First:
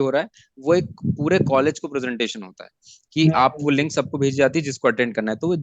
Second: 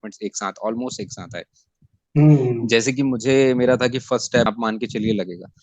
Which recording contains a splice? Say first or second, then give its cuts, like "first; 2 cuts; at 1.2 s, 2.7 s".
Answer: second; 1 cut; at 4.5 s